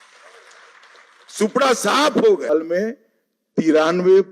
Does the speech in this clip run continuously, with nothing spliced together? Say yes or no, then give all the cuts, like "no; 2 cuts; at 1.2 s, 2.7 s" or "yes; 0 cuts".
no; 1 cut; at 2.5 s